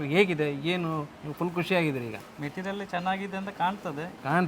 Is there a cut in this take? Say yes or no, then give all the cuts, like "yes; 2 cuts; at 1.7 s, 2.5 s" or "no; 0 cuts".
no; 0 cuts